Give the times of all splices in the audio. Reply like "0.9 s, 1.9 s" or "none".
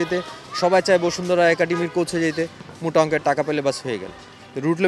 none